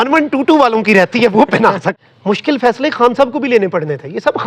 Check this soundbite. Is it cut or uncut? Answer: cut